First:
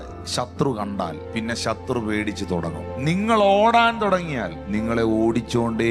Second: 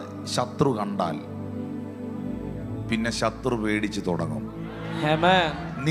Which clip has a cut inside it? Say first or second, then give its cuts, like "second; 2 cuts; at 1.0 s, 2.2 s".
first; 3 cuts; at 1.2 s, 2.9 s, 4.6 s